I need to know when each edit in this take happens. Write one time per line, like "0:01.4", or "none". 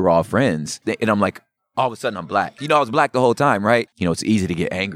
0:00.8
0:02.6
0:03.8